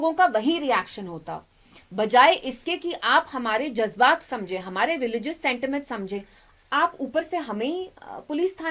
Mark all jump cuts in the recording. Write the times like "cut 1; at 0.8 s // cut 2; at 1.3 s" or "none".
none

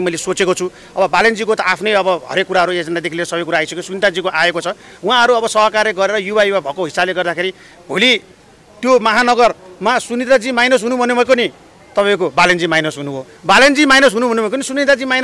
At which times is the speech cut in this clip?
none

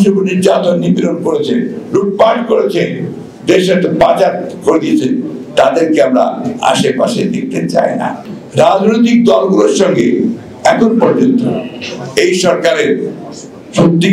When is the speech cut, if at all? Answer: cut 1; at 8.2 s

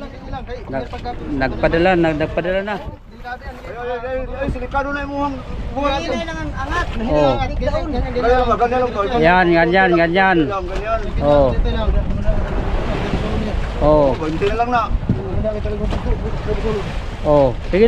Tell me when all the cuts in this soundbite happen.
none

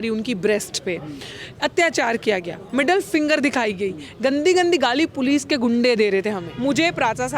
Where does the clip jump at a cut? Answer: cut 1; at 6.5 s

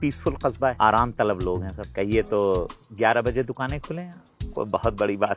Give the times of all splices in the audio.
cut 1; at 0.8 s // cut 2; at 1.8 s // cut 3; at 2.8 s

